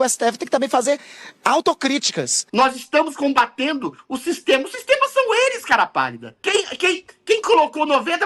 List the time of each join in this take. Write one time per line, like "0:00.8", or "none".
0:02.4